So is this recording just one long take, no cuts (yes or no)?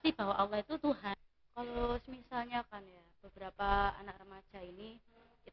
no